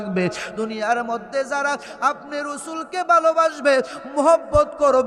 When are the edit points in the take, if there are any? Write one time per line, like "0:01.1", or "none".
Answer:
none